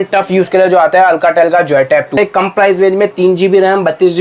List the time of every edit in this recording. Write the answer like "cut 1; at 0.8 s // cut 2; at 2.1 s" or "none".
cut 1; at 2.1 s

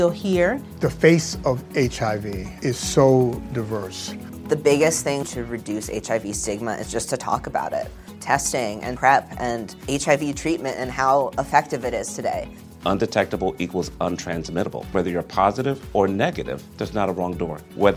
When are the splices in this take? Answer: none

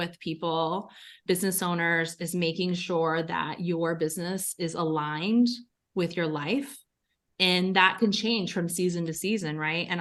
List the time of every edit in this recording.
none

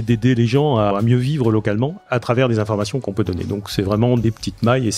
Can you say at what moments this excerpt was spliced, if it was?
cut 1; at 0.9 s // cut 2; at 2.0 s // cut 3; at 3.0 s // cut 4; at 4.2 s

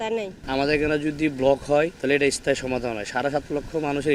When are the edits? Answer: cut 1; at 2.0 s

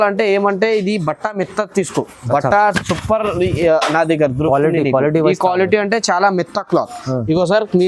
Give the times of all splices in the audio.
none

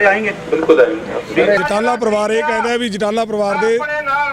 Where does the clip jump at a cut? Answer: cut 1; at 1.6 s

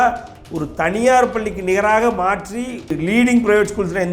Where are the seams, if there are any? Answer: cut 1; at 3.0 s

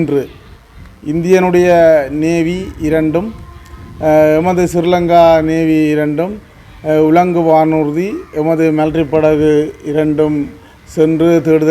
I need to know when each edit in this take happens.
none

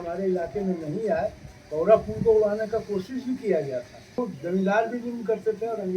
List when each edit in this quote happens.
cut 1; at 4.2 s

